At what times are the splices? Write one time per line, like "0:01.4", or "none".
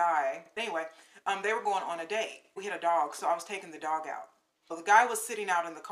0:00.8
0:02.6
0:04.7

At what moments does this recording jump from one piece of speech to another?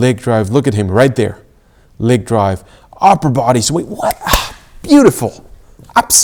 none

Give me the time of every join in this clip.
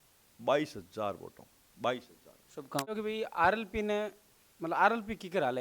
0:02.9

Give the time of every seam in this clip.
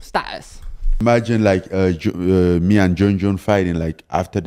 0:01.0

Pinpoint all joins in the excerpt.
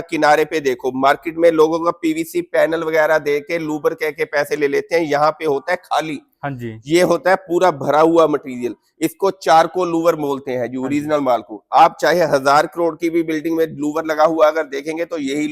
none

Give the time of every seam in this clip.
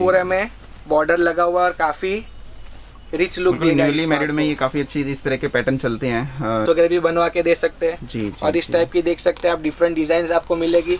0:06.6

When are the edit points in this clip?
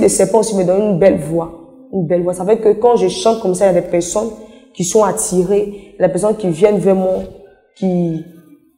none

